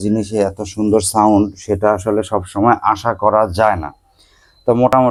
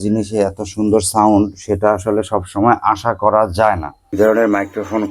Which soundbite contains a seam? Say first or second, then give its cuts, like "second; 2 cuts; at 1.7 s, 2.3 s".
second; 1 cut; at 4.1 s